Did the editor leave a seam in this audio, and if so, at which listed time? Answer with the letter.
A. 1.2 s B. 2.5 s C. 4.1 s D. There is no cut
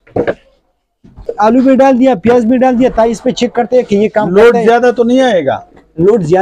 A